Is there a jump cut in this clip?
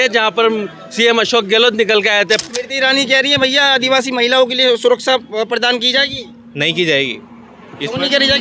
yes; 1 cut; at 2.5 s

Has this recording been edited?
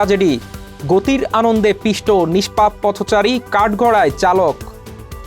no; 0 cuts

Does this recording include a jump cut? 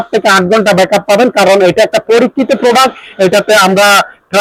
no; 0 cuts

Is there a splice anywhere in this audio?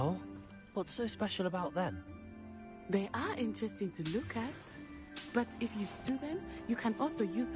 no; 0 cuts

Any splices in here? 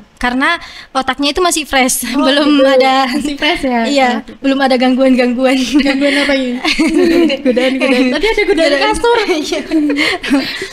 no; 0 cuts

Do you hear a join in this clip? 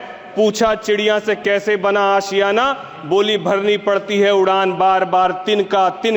no; 0 cuts

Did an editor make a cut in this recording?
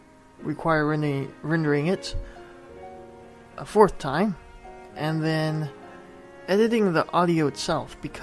no; 0 cuts

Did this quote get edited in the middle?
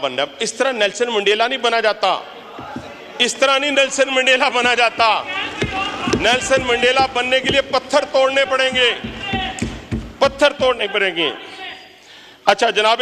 no; 0 cuts

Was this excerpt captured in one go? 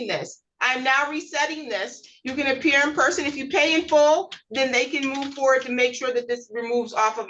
yes; 0 cuts

